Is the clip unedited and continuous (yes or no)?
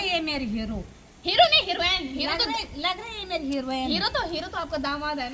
yes